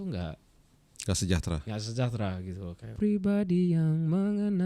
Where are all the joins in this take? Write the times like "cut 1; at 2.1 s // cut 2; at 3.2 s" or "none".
cut 1; at 2.9 s